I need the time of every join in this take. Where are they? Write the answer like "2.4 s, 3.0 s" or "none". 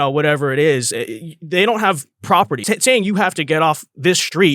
2.6 s